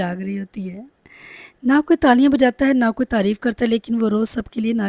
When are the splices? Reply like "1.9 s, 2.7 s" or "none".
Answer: none